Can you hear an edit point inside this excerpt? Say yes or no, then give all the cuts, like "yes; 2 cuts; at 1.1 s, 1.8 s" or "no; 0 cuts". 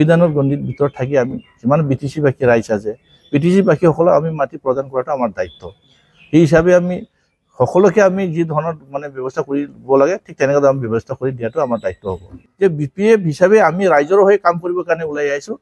yes; 1 cut; at 12.4 s